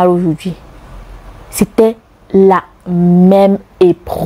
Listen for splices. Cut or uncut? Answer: uncut